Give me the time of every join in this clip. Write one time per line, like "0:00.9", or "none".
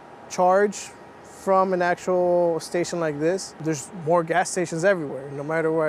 0:03.5

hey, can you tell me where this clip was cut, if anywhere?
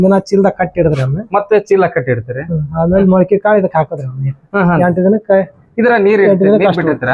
none

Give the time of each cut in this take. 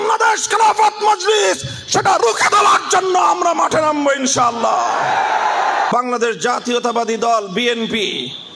0:05.9

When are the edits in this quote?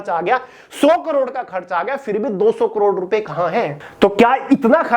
0:03.8

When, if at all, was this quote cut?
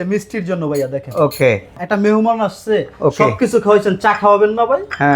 0:01.7

